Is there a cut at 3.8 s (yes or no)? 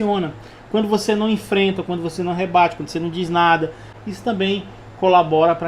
yes